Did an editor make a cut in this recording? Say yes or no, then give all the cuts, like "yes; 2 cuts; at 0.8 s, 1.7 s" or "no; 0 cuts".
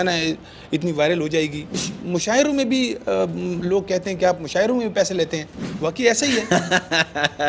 yes; 1 cut; at 1.9 s